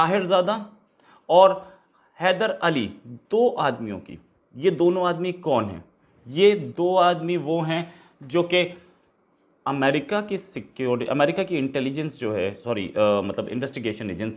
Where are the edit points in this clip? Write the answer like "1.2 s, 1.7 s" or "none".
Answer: none